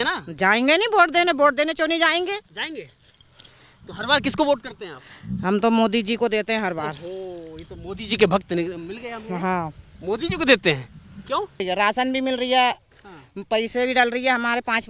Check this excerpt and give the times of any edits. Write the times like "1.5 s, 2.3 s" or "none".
11.6 s